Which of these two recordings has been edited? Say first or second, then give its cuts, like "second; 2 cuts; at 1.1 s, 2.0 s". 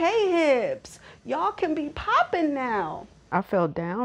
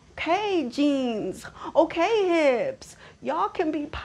first; 1 cut; at 3.1 s